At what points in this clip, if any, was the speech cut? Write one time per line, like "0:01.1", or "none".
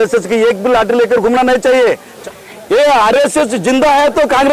0:02.1